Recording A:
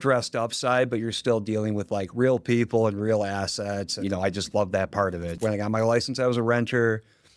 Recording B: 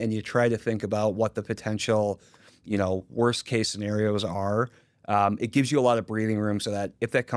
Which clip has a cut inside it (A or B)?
A